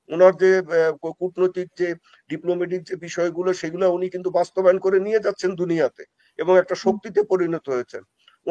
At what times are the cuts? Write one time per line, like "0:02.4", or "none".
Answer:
none

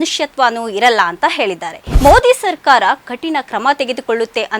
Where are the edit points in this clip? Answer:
0:01.9

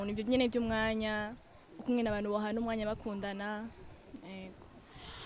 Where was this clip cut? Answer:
none

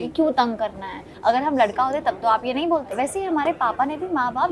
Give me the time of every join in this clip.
0:01.0
0:02.9

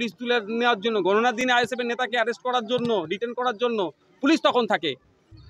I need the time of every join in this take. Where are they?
none

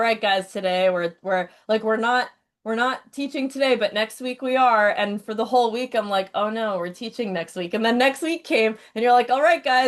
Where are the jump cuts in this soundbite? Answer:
none

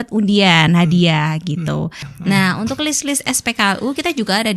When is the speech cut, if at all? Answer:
0:02.0

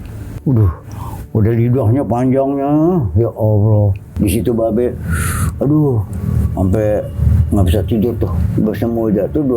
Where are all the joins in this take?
0:04.1

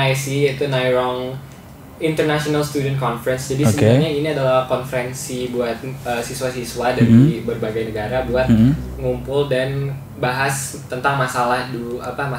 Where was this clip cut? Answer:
none

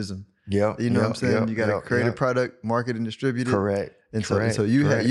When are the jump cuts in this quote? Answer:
0:04.0

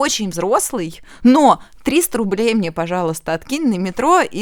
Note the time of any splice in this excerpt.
none

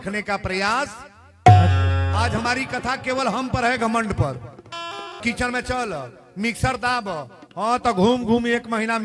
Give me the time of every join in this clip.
0:05.2

